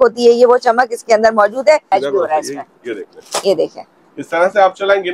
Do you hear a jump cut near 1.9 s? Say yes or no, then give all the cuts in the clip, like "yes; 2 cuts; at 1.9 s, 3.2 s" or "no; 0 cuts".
yes; 1 cut; at 1.9 s